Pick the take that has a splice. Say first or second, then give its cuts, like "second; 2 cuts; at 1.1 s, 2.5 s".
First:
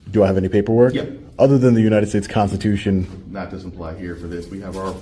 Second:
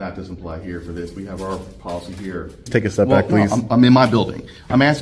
second; 1 cut; at 2.7 s